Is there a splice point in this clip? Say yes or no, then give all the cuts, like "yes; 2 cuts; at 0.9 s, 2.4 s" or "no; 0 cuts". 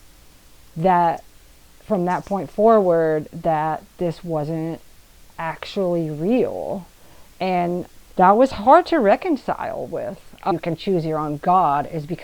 yes; 2 cuts; at 8.0 s, 10.5 s